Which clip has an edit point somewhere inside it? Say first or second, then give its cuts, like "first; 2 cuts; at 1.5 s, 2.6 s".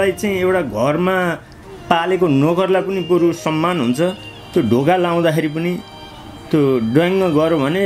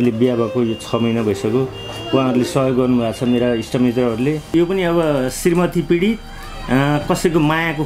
second; 1 cut; at 4.5 s